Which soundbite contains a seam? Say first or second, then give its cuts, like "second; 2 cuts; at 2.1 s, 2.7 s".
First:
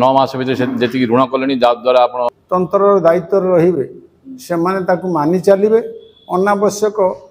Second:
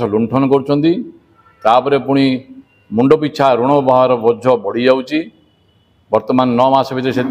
first; 1 cut; at 2.2 s